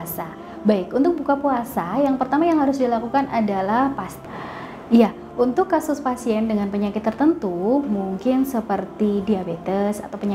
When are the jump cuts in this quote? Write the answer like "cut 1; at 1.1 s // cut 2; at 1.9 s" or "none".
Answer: cut 1; at 4.1 s